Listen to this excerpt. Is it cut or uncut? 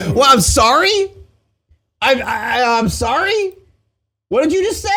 uncut